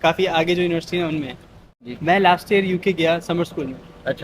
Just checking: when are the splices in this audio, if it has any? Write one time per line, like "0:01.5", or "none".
0:01.7